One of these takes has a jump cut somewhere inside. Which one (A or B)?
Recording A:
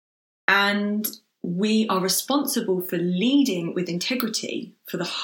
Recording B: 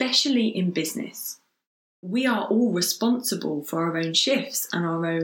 B